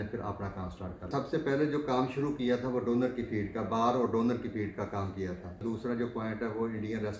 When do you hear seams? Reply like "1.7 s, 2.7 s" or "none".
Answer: 1.1 s, 5.6 s